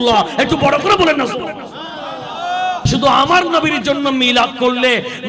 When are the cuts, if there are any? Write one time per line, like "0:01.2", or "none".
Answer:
0:02.8